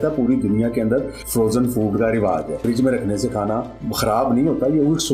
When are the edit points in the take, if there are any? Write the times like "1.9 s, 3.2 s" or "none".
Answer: 1.2 s, 2.6 s, 3.8 s